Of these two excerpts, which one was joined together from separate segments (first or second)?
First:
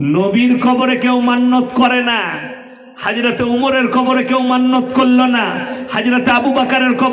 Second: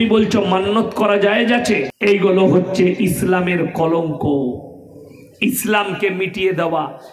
second